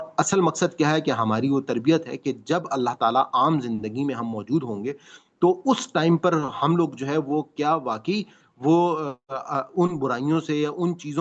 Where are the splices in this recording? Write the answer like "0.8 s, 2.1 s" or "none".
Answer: none